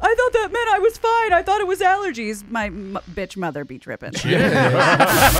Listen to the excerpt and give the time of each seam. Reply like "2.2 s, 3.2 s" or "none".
none